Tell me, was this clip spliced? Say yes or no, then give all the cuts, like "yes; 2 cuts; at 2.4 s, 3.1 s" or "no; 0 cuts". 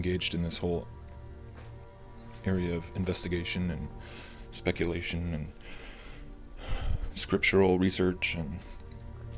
yes; 1 cut; at 5.3 s